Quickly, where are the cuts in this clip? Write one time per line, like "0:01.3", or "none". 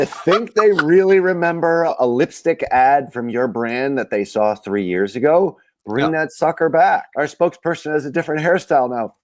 0:01.9
0:07.1